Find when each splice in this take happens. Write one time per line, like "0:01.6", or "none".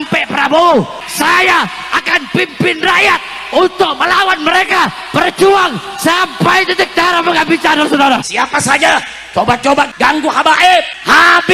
0:01.0
0:08.3